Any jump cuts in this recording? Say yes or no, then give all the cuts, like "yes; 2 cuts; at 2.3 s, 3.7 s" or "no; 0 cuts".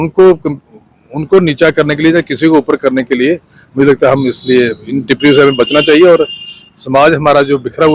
no; 0 cuts